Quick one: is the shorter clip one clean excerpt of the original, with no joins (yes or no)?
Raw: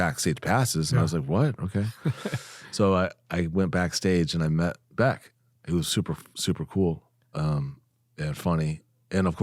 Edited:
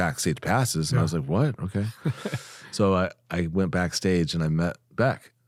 yes